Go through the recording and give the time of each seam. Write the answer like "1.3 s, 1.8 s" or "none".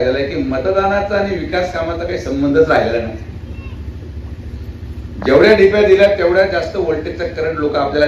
none